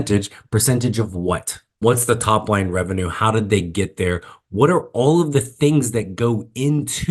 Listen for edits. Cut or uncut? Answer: cut